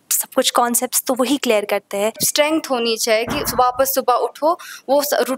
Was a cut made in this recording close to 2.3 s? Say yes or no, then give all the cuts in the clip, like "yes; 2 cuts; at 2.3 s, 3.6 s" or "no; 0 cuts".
yes; 1 cut; at 2.3 s